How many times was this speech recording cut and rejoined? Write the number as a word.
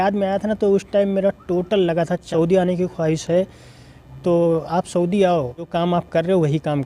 two